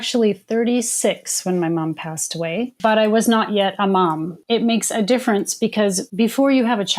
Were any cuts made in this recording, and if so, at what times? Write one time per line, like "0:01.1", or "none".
0:02.8
0:04.4
0:06.0